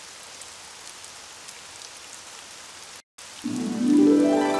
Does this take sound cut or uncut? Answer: cut